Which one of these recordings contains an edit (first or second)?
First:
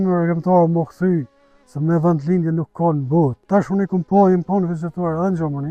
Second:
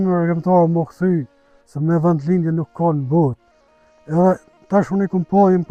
first